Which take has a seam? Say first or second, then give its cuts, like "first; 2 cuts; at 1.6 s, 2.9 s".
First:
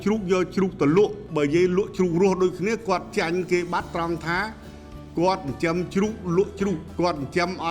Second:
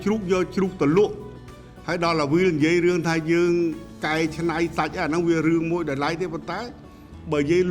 first; 2 cuts; at 1.2 s, 6.9 s